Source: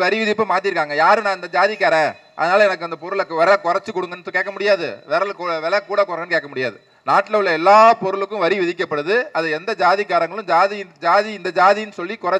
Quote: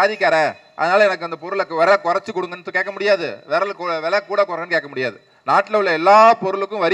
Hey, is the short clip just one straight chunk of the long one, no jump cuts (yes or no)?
yes